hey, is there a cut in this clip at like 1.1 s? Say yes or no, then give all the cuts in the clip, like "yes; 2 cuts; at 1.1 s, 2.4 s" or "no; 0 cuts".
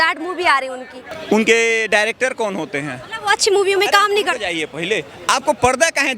yes; 1 cut; at 1.1 s